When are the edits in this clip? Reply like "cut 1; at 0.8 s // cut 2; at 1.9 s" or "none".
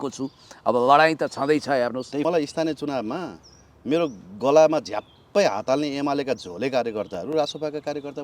cut 1; at 2.2 s